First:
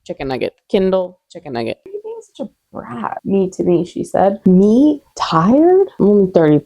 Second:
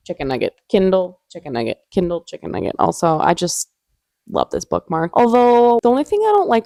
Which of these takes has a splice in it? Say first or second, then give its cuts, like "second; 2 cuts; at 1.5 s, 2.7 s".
first; 2 cuts; at 1.9 s, 4.4 s